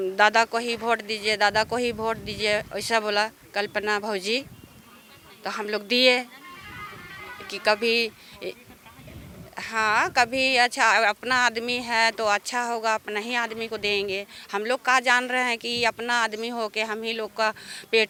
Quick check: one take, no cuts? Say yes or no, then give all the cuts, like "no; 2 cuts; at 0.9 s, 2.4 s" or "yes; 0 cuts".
yes; 0 cuts